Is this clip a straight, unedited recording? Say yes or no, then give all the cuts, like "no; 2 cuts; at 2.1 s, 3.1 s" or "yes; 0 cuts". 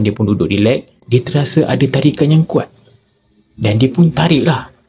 yes; 0 cuts